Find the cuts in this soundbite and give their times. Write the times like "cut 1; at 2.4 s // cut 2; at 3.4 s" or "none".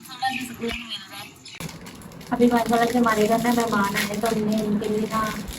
cut 1; at 1.6 s